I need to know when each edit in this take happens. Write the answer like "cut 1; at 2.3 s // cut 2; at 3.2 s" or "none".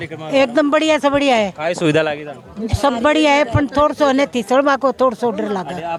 none